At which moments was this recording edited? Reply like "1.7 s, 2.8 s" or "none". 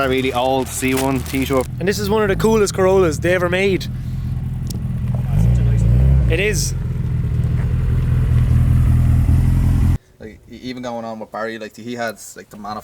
1.7 s, 9.9 s